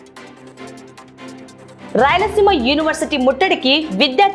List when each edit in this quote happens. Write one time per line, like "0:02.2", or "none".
0:01.6

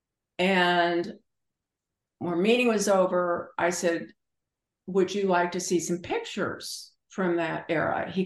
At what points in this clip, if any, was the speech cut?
none

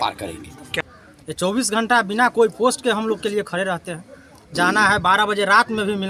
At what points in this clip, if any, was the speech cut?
0:00.8
0:04.5

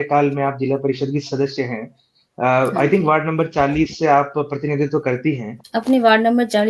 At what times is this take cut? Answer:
0:05.5

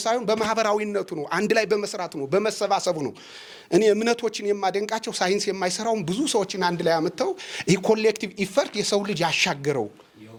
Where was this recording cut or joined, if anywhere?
none

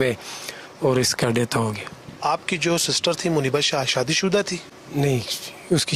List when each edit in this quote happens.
none

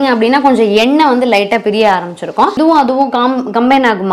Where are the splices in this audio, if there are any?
0:02.6

